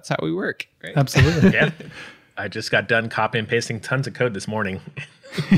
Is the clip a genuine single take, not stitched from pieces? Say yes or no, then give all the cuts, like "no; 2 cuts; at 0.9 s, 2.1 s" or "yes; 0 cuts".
yes; 0 cuts